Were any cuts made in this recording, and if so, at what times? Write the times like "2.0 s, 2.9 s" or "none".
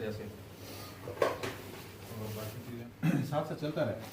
2.8 s